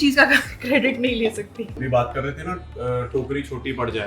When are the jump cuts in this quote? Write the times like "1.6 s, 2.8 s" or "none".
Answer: 1.8 s